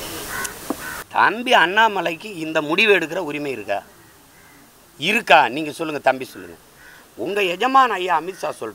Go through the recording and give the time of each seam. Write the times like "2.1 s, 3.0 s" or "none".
0.9 s